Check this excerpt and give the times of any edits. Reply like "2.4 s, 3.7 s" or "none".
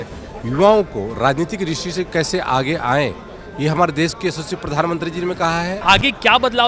5.8 s